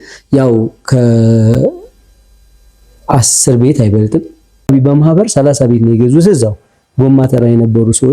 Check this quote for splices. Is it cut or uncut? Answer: cut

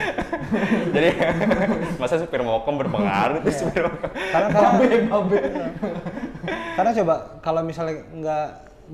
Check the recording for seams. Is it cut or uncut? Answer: uncut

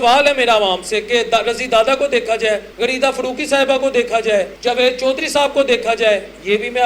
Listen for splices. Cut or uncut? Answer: cut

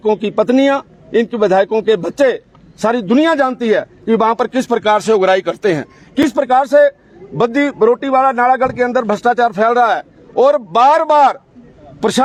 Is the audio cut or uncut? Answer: uncut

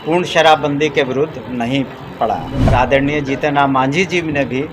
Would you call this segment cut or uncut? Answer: cut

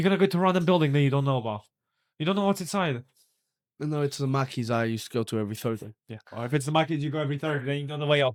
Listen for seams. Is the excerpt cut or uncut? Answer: uncut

